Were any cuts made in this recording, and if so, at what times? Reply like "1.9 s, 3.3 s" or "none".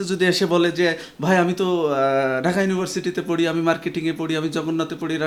none

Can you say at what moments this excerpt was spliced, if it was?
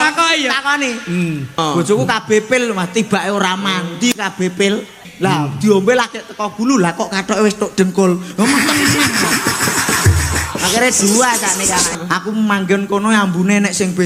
1.6 s, 5.0 s, 12.0 s

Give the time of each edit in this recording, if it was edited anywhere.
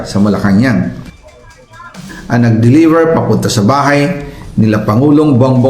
1.6 s

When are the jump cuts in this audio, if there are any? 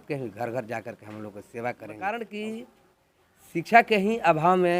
1.9 s

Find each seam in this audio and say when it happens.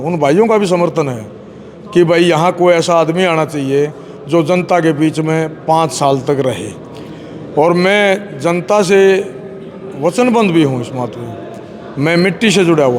none

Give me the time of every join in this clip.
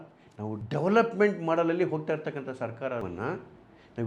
3.0 s

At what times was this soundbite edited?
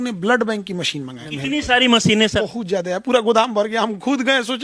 1.2 s, 2.4 s

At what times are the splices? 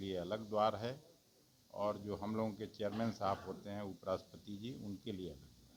none

